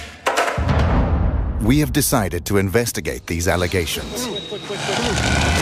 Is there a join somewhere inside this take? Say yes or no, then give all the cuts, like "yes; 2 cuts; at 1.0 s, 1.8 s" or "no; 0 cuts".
yes; 1 cut; at 4.0 s